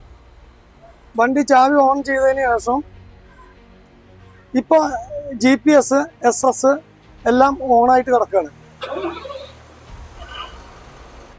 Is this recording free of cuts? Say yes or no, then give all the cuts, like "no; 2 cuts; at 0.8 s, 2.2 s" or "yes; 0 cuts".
yes; 0 cuts